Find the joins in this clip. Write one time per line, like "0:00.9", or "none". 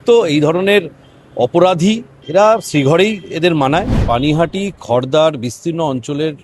0:02.1
0:04.0